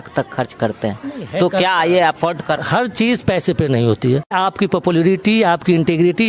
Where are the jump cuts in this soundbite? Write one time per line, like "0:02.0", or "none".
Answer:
0:02.7
0:04.3